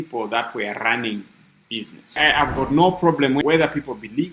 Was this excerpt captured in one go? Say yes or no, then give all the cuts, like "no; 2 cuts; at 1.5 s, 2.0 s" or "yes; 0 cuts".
no; 2 cuts; at 2.2 s, 3.4 s